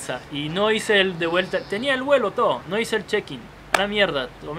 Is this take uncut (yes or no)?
yes